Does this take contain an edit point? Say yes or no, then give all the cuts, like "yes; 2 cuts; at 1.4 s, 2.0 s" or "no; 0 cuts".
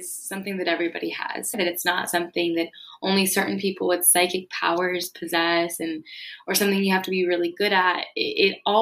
yes; 1 cut; at 1.6 s